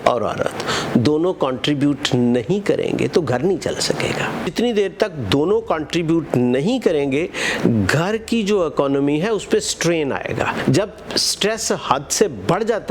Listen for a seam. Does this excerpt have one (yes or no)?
yes